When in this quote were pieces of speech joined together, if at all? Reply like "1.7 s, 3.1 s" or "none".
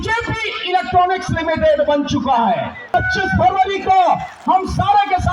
2.9 s